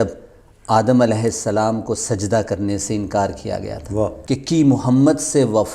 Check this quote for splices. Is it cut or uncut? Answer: cut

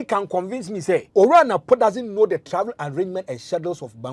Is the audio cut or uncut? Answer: cut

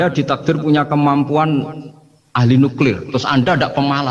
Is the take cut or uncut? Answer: uncut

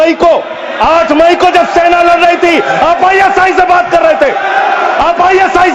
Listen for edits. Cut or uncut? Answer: uncut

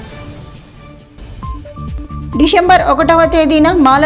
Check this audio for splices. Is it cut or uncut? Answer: uncut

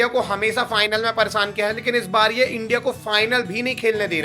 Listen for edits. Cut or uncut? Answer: uncut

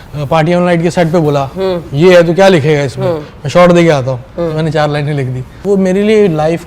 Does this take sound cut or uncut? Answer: cut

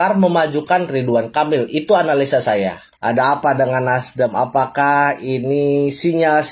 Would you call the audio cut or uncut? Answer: cut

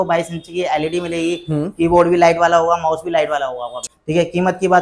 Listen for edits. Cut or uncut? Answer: cut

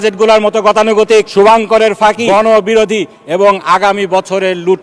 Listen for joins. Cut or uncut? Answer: cut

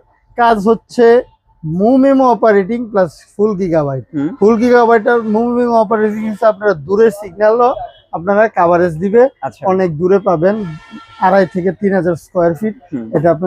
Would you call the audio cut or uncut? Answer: uncut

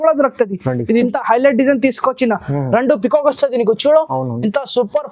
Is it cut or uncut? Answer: cut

